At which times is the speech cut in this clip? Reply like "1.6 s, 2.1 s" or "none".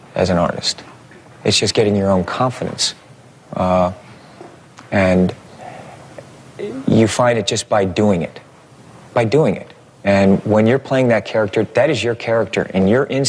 none

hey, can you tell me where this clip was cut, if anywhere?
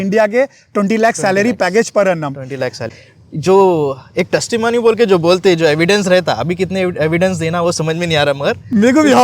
2.8 s

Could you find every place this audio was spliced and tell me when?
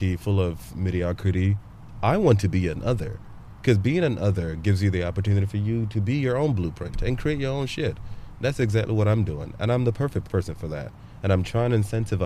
10.3 s

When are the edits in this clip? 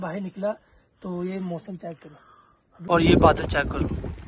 2.7 s

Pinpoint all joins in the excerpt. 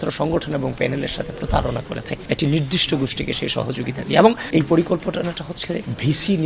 2.1 s, 4.4 s

